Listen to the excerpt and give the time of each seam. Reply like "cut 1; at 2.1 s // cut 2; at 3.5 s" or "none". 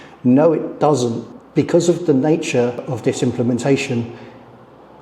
cut 1; at 1.3 s // cut 2; at 2.8 s